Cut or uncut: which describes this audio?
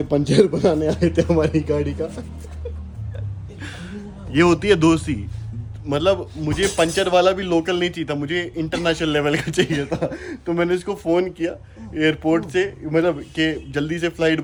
uncut